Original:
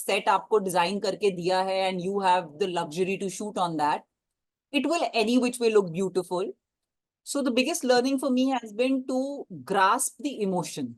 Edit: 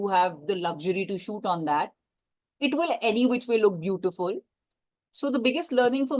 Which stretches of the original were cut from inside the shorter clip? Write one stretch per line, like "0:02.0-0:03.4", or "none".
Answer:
none